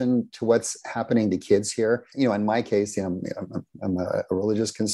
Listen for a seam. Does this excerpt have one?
yes; 1 cut; at 2.1 s

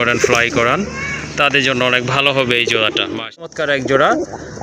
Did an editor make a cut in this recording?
yes; 1 cut; at 3.5 s

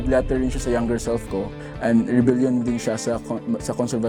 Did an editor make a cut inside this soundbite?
no; 0 cuts

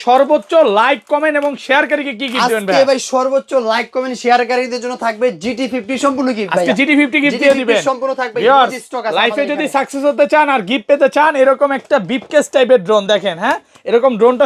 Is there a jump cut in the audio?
no; 0 cuts

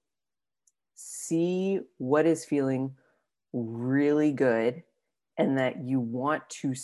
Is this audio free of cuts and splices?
yes; 0 cuts

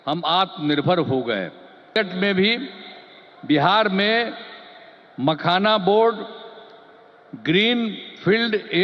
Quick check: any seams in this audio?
yes; 1 cut; at 2.0 s

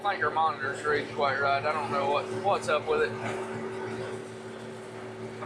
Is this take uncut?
yes; 0 cuts

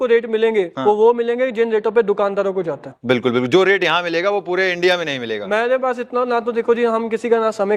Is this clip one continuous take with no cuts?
yes; 0 cuts

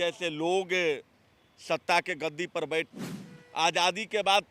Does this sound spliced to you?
yes; 1 cut; at 2.9 s

